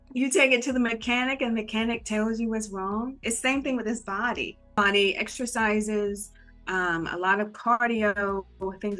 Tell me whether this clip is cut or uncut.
cut